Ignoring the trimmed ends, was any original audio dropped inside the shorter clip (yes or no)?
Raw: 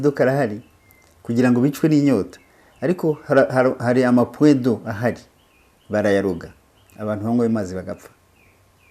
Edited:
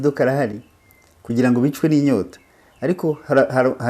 no